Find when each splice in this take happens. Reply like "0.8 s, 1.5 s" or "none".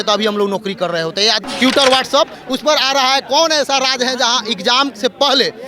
1.4 s